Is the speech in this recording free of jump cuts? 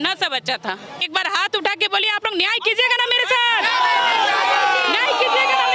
no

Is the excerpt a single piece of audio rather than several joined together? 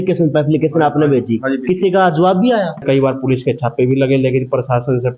no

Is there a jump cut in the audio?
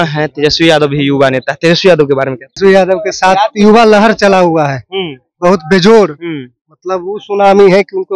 yes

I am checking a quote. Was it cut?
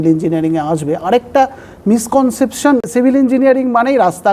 yes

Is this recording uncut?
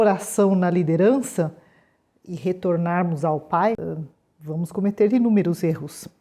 no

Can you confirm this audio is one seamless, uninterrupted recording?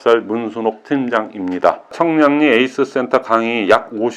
no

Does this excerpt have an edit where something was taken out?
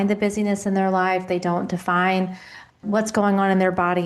yes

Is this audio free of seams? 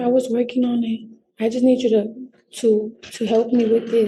yes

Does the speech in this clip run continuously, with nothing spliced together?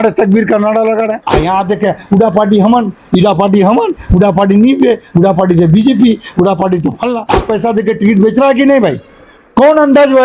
no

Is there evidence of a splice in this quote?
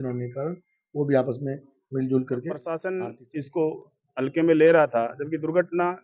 yes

